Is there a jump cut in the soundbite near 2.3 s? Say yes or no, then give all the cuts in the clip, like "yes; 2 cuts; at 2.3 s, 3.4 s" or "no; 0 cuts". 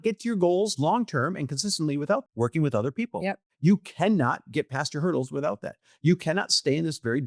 yes; 2 cuts; at 2.3 s, 3.4 s